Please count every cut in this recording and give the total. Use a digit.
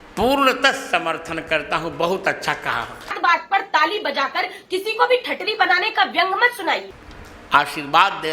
2